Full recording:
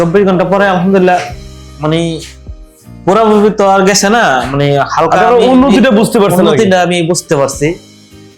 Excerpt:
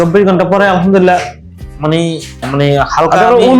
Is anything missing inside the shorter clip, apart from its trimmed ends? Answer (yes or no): yes